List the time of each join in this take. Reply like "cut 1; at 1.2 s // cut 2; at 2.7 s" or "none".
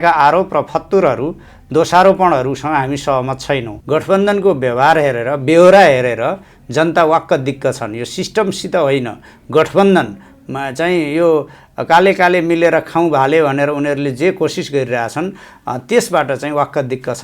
cut 1; at 3.7 s